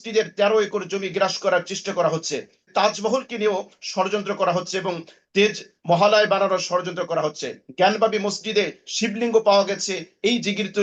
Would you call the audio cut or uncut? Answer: cut